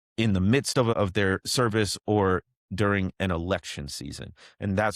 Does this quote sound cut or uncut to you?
cut